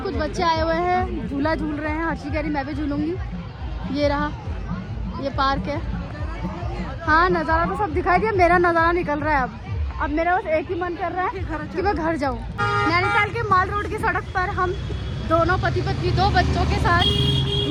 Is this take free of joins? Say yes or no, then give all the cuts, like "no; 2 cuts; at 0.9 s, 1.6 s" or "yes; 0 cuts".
yes; 0 cuts